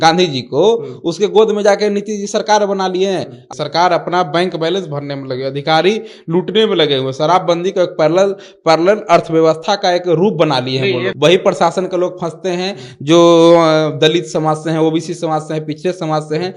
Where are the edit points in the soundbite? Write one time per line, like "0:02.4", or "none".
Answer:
0:03.4
0:11.1